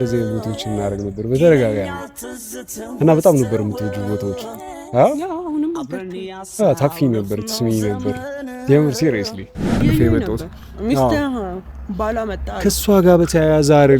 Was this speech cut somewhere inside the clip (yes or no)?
yes